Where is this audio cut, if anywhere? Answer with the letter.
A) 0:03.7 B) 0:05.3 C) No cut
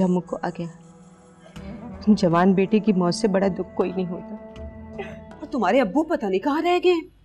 B